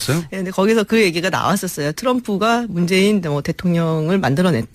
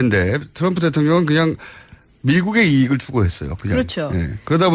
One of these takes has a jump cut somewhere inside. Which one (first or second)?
second